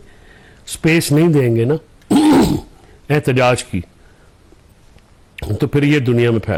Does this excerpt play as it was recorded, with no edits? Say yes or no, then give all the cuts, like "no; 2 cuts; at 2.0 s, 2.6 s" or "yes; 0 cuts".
yes; 0 cuts